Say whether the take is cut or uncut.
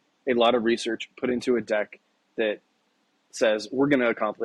uncut